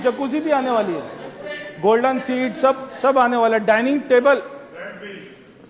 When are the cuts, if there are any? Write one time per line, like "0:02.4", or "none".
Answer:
none